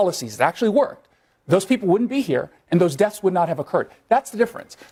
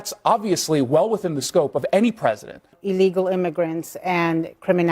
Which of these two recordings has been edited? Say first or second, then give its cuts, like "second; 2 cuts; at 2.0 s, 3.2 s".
second; 1 cut; at 2.8 s